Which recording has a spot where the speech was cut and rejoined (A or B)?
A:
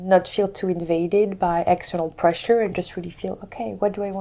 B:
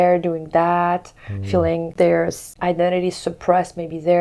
B